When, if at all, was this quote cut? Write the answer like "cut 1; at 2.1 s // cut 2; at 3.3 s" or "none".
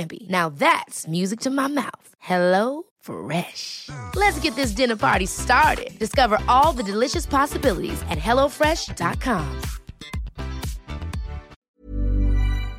cut 1; at 11.7 s